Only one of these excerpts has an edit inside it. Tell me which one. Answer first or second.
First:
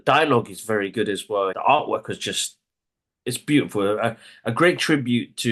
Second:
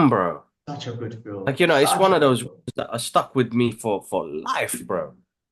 first